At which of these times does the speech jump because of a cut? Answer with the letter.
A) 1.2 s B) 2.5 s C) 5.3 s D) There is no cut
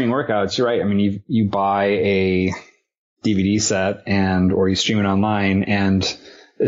A